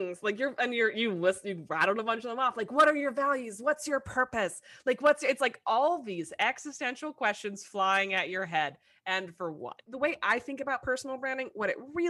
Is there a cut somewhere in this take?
yes; 1 cut; at 9.9 s

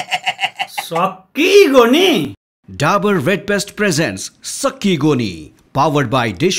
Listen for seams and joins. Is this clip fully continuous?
no; 1 cut; at 2.4 s

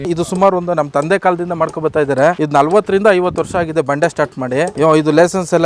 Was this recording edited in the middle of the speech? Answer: yes; 2 cuts; at 2.4 s, 4.7 s

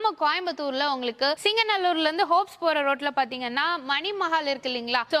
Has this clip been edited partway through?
no; 0 cuts

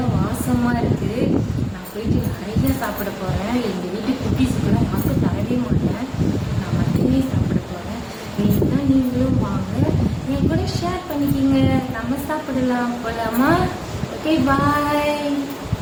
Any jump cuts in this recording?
no; 0 cuts

